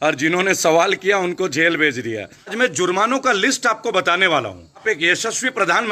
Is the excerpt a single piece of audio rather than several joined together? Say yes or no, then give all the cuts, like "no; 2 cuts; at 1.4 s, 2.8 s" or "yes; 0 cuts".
no; 2 cuts; at 2.5 s, 4.8 s